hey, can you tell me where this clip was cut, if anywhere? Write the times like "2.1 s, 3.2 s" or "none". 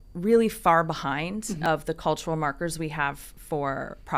1.6 s